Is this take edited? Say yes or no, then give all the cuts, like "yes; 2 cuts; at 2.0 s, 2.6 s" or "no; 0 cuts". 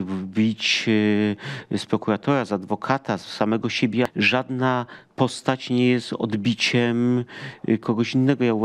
yes; 1 cut; at 4.1 s